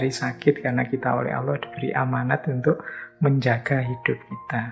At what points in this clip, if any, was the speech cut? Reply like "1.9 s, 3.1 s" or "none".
none